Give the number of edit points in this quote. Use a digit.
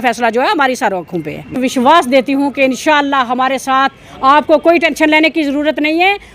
1